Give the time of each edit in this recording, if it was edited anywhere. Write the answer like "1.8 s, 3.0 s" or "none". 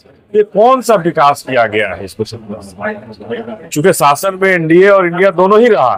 none